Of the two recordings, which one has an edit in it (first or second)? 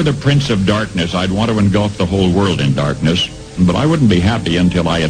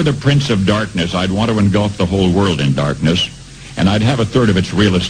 first